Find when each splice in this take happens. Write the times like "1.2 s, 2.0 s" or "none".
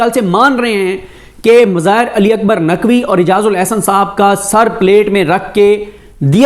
none